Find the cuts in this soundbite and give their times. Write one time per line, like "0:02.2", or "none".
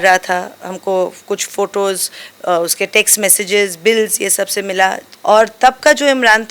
0:05.1